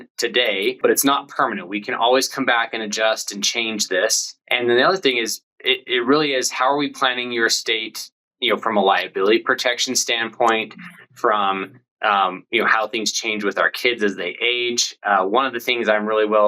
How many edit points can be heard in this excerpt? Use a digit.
2